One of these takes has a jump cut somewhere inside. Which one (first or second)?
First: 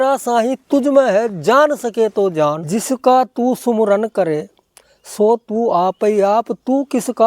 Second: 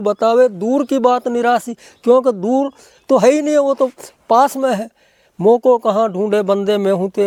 first